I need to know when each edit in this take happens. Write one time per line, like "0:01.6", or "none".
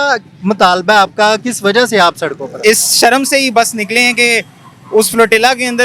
0:02.5